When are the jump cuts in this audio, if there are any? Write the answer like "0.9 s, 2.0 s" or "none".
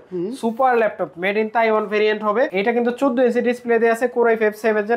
2.5 s